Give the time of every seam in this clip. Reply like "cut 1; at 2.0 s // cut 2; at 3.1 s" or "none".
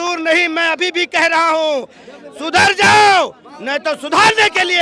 none